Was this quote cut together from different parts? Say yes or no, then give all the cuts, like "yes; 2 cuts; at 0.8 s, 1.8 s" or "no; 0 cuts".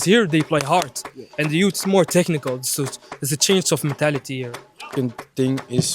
yes; 1 cut; at 4.9 s